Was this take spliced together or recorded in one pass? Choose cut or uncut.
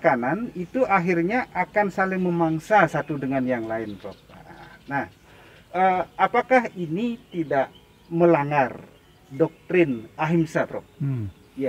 uncut